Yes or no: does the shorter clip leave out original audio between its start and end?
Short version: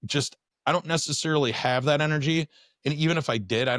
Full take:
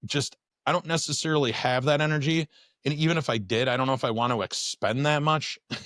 no